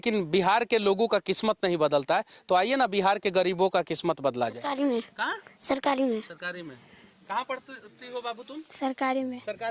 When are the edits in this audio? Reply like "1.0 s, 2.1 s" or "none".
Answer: 4.6 s